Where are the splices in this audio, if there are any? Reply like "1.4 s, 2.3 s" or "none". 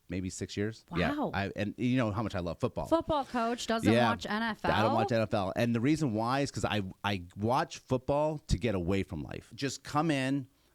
9.4 s